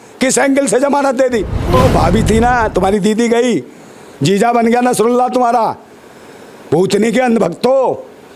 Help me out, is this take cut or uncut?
cut